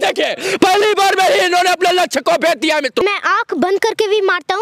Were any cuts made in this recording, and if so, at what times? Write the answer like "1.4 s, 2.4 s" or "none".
3.0 s